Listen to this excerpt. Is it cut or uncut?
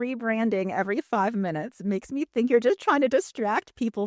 uncut